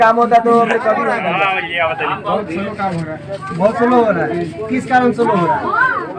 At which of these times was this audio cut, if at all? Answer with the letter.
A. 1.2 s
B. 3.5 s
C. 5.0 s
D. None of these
A